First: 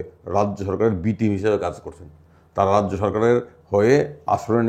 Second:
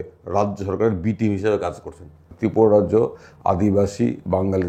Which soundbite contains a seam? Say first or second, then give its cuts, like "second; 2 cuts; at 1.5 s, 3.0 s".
second; 1 cut; at 2.2 s